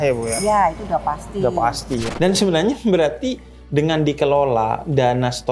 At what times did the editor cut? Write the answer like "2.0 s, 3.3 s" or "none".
2.1 s